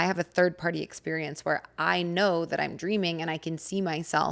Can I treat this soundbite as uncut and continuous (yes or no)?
yes